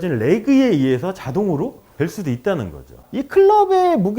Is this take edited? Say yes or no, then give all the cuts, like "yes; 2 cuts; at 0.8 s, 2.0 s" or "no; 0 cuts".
yes; 1 cut; at 3.0 s